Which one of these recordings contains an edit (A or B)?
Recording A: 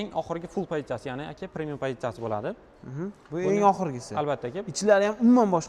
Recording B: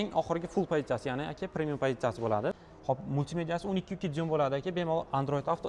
B